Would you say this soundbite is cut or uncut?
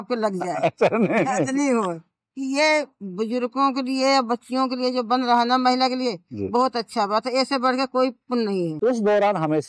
cut